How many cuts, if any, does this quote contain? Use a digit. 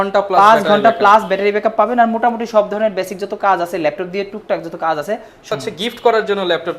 1